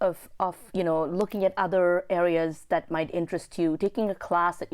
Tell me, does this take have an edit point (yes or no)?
no